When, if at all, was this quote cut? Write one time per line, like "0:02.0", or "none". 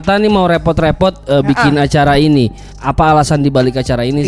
0:02.8